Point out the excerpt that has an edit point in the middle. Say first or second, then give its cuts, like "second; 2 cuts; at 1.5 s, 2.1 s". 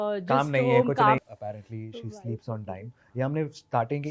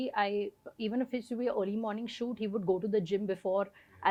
first; 1 cut; at 1.2 s